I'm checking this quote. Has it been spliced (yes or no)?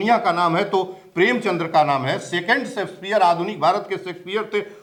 no